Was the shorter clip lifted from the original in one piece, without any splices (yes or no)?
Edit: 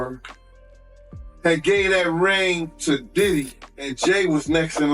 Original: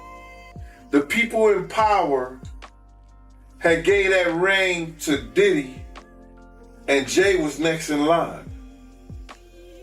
no